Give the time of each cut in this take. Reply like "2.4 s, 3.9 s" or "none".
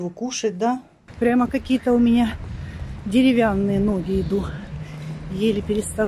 1.0 s